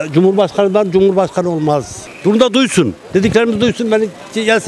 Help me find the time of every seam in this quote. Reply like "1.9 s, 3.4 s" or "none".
1.9 s